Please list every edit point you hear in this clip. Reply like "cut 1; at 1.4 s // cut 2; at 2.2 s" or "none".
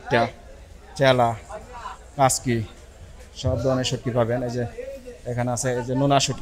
none